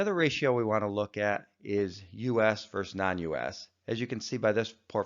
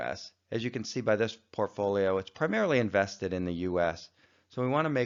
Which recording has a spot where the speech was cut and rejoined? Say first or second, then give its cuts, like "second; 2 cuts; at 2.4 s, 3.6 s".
first; 1 cut; at 2.4 s